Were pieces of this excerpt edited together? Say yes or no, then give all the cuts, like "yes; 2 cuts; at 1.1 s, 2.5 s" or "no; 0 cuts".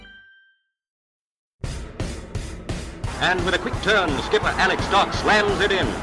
yes; 1 cut; at 1.2 s